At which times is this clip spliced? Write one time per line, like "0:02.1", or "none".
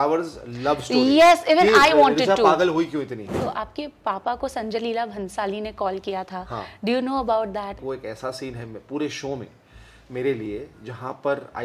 0:03.3
0:07.8